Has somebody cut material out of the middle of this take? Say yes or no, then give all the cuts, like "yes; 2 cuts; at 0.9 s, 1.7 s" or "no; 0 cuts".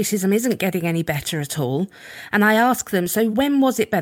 no; 0 cuts